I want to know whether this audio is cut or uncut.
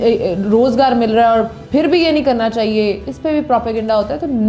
uncut